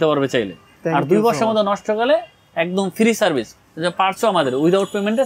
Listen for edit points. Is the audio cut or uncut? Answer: uncut